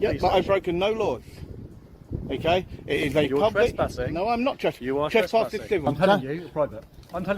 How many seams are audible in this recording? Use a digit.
1